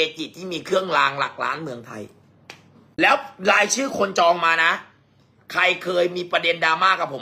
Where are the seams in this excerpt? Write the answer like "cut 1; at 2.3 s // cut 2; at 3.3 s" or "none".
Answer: cut 1; at 2.8 s